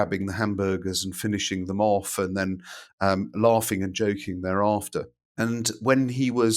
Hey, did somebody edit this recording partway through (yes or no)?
yes